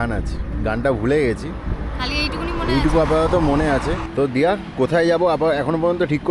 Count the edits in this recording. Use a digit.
1